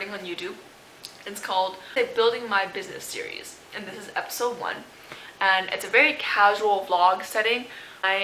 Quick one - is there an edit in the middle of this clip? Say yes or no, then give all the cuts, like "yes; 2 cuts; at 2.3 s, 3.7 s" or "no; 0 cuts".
yes; 1 cut; at 1.9 s